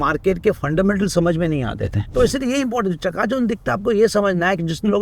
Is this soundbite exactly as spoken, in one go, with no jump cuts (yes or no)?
no